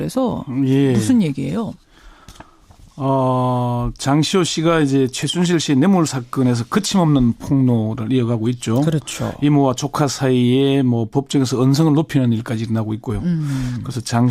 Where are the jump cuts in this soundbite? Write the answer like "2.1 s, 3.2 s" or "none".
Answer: none